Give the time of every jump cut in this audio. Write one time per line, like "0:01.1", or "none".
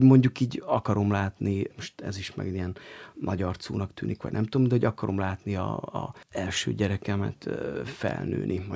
0:01.7